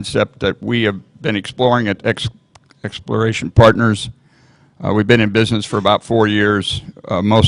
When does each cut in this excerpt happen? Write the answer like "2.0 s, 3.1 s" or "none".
none